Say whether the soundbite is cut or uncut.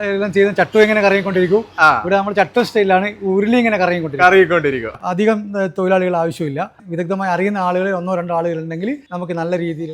cut